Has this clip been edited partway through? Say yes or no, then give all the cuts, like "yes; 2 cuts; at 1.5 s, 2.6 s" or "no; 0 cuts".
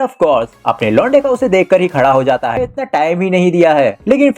yes; 1 cut; at 2.7 s